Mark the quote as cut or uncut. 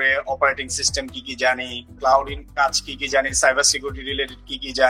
uncut